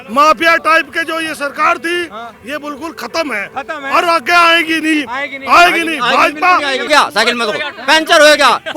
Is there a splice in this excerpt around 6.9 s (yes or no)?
yes